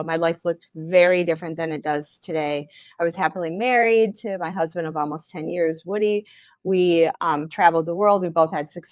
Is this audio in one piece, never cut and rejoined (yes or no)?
yes